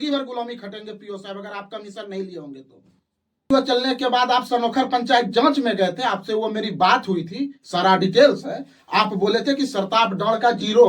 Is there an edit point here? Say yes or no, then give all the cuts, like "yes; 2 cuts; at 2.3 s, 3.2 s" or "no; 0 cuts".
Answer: yes; 1 cut; at 3.5 s